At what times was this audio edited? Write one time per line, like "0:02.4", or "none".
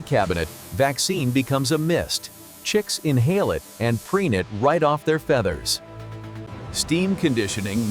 0:06.4